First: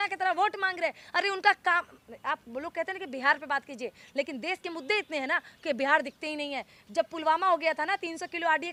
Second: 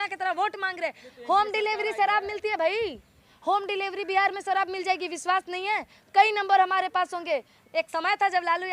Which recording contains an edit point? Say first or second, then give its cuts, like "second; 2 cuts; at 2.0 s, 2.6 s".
second; 2 cuts; at 1.0 s, 7.6 s